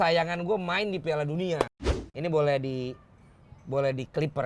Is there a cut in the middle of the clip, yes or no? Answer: yes